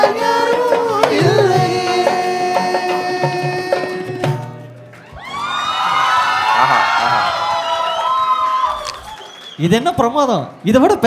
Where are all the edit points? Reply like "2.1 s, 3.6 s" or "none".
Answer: none